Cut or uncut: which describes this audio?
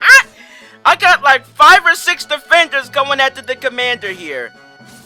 uncut